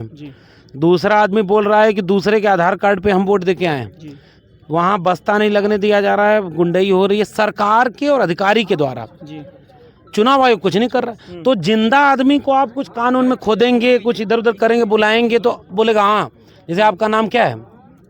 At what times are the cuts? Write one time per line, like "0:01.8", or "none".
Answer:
none

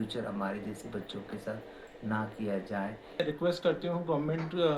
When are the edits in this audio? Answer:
0:03.2

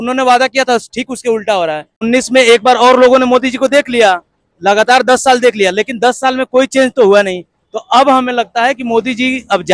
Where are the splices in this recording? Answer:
0:02.0

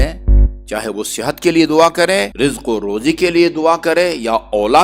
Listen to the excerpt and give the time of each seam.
0:02.3

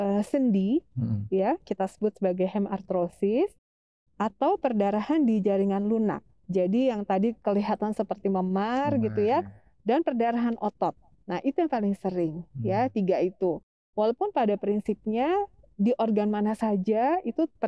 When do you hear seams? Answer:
none

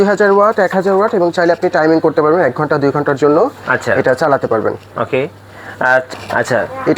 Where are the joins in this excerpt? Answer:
0:06.1

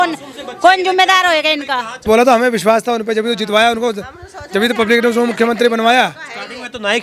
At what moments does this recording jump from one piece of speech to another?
0:02.1

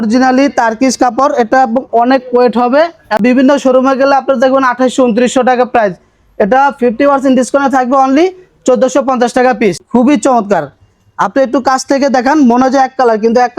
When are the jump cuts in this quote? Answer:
0:03.2
0:09.8

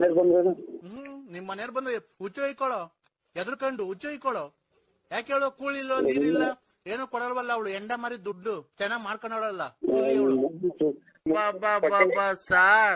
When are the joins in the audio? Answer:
0:11.2

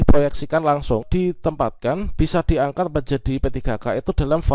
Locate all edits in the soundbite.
0:01.1

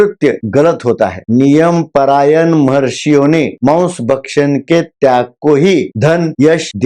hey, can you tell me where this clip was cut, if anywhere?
0:01.2

